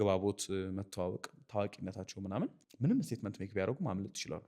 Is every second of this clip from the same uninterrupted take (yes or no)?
no